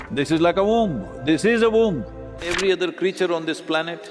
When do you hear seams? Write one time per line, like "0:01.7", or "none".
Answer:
0:02.4